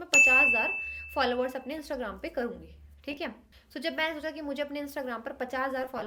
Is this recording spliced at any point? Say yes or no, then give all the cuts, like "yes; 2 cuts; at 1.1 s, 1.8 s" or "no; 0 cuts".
no; 0 cuts